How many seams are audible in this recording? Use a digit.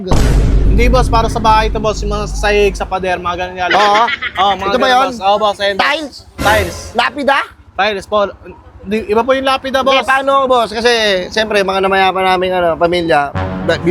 0